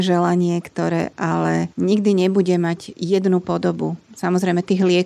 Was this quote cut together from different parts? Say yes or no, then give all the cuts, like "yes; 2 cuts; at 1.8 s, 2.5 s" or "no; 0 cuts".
no; 0 cuts